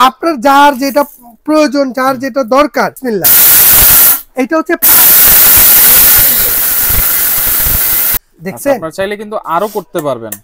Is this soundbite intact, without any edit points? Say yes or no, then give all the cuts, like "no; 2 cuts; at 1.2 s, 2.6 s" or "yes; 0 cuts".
no; 2 cuts; at 3.0 s, 8.2 s